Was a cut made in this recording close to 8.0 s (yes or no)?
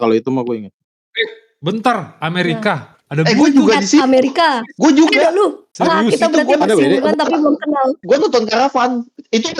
yes